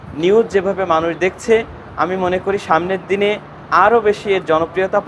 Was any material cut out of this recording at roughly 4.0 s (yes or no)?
no